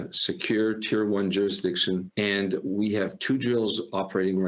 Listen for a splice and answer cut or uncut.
cut